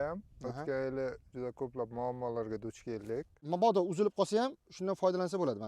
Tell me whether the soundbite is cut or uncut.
cut